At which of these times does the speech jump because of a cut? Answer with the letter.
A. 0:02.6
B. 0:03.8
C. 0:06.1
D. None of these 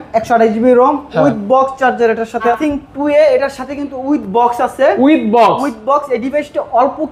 A